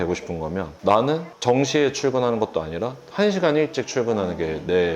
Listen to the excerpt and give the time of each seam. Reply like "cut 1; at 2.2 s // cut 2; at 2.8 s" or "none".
none